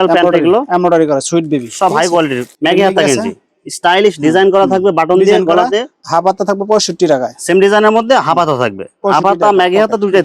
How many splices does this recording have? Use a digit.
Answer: 2